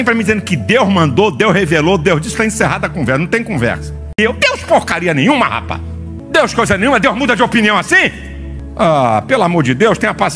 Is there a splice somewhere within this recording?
yes; 1 cut; at 4.2 s

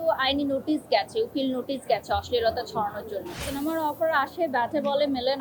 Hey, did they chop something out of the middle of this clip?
yes; 1 cut; at 3.4 s

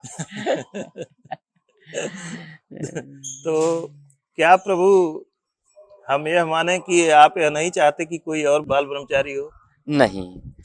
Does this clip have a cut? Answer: yes; 1 cut; at 8.6 s

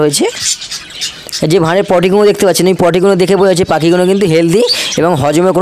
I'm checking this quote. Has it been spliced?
no; 0 cuts

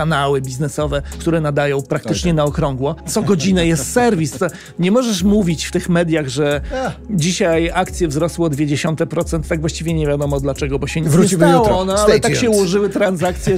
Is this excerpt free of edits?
no; 2 cuts; at 1.1 s, 3.1 s

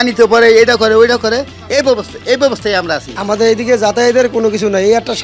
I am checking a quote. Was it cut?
yes; 1 cut; at 3.0 s

